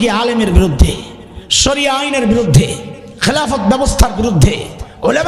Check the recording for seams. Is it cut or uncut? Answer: uncut